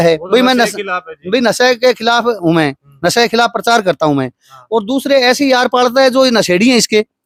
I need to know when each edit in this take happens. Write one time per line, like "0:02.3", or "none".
none